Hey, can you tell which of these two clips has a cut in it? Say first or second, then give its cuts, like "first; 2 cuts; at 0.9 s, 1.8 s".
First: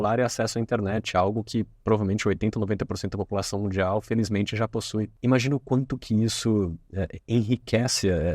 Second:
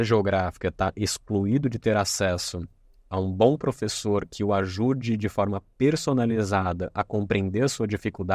first; 1 cut; at 5.1 s